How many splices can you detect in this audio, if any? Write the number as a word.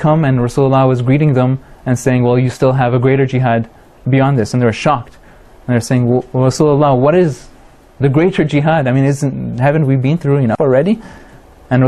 one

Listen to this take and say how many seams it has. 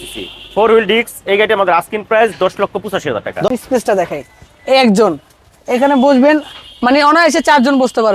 one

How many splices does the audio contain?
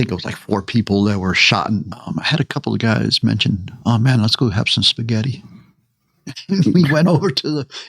one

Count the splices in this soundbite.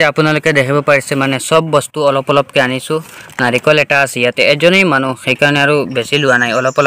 zero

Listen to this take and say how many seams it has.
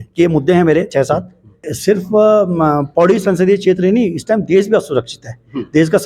one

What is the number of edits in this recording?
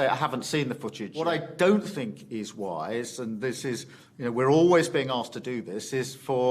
one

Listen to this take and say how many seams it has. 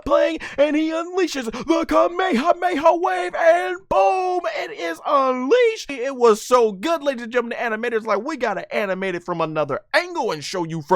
one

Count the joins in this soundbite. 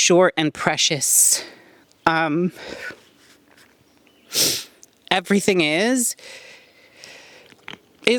zero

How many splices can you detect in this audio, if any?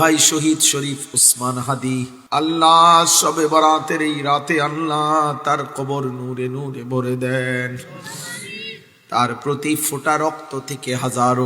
one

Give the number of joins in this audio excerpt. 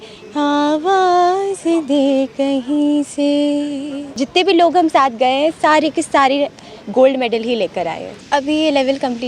two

